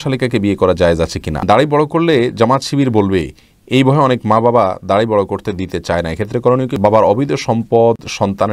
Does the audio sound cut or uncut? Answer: cut